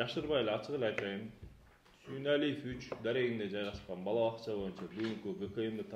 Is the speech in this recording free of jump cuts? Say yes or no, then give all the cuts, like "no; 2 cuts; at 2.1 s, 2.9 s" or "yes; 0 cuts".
yes; 0 cuts